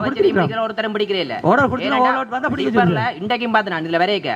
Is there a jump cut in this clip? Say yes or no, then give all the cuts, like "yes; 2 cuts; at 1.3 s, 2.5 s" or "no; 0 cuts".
no; 0 cuts